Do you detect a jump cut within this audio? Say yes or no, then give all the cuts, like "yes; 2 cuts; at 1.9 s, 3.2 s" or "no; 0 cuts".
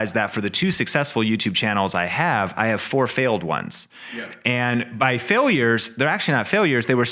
no; 0 cuts